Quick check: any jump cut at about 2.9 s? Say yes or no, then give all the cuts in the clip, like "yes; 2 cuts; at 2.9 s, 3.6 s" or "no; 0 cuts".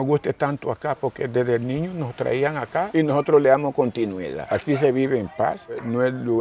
yes; 1 cut; at 2.9 s